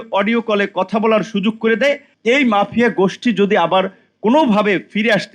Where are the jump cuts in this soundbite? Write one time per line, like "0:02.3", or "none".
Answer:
0:02.1